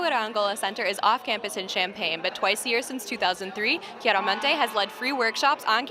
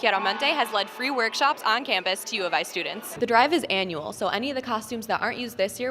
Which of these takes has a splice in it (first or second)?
second